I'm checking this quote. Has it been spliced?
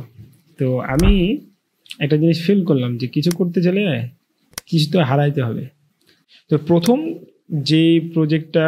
yes; 1 cut; at 6.1 s

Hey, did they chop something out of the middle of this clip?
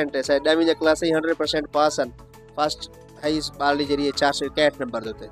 no; 0 cuts

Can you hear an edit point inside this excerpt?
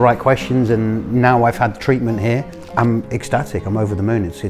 no; 0 cuts

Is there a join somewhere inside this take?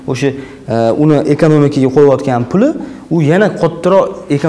no; 0 cuts

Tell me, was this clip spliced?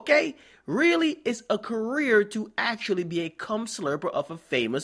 no; 0 cuts

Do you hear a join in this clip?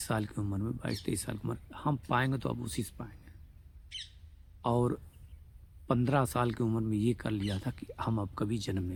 no; 0 cuts

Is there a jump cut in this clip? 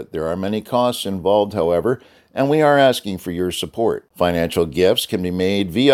no; 0 cuts

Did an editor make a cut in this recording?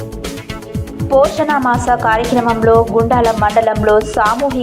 yes; 1 cut; at 0.9 s

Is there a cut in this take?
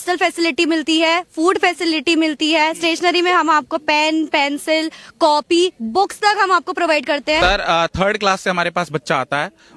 yes; 1 cut; at 7.4 s

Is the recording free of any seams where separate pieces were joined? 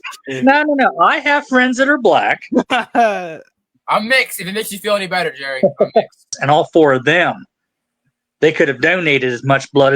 no; 1 cut; at 6.3 s

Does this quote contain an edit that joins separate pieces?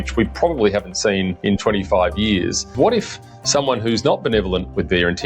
yes; 2 cuts; at 1.3 s, 2.7 s

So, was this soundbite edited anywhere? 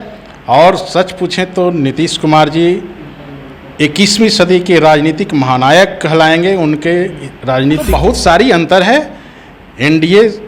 yes; 1 cut; at 7.9 s

